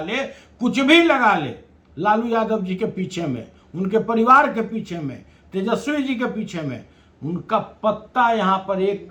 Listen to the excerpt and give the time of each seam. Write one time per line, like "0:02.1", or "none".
none